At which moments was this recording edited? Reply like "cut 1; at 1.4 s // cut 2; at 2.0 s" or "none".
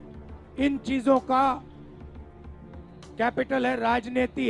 cut 1; at 1.6 s // cut 2; at 3.2 s